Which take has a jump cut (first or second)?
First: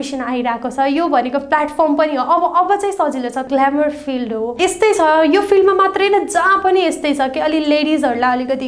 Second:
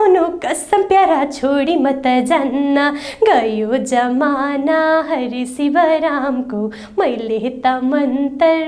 first